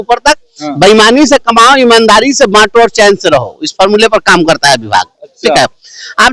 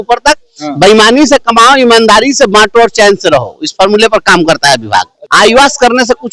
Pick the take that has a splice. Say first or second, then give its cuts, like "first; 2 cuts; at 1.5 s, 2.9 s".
second; 1 cut; at 5.2 s